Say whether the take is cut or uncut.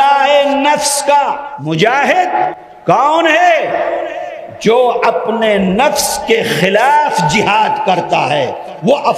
cut